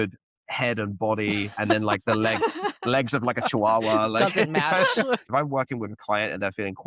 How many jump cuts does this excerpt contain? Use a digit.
1